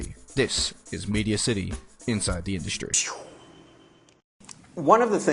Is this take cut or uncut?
cut